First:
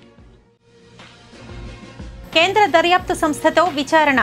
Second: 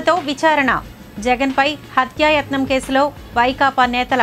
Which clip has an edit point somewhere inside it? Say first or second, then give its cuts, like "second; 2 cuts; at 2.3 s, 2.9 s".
first; 1 cut; at 2.2 s